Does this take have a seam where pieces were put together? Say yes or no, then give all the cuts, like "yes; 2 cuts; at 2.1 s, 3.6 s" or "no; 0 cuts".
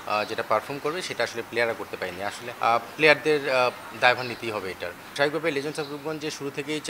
yes; 2 cuts; at 2.5 s, 5.1 s